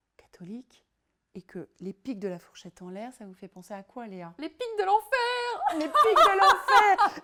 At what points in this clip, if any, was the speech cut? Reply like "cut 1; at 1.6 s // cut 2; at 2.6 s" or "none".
none